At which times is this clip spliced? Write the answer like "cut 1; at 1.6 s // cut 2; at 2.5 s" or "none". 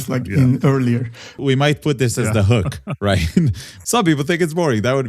cut 1; at 1.3 s // cut 2; at 3.7 s